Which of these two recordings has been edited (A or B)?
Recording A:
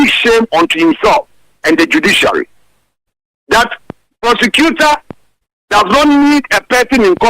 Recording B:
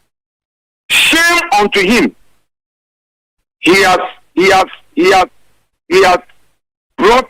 A